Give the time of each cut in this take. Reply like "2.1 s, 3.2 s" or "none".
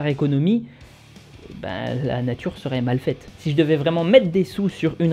3.3 s